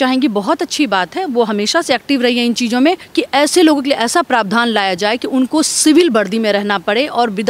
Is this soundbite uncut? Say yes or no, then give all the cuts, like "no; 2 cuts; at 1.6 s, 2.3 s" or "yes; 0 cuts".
no; 1 cut; at 3.1 s